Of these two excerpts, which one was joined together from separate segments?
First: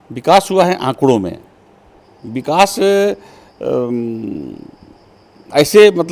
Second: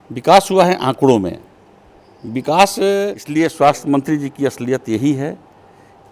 second; 1 cut; at 3.2 s

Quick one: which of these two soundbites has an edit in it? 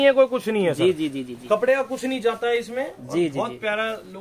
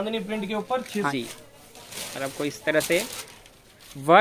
second; 1 cut; at 1.1 s

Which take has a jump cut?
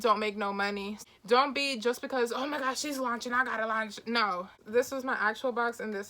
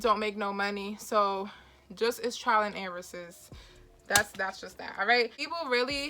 first; 2 cuts; at 1.0 s, 4.6 s

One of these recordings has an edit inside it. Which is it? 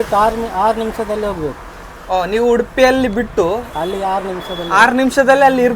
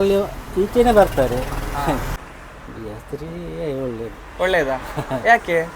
second; 1 cut; at 2.2 s

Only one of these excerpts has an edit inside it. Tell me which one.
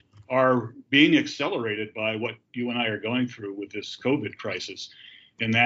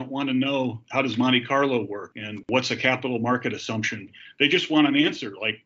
second; 3 cuts; at 0.8 s, 2.5 s, 4.0 s

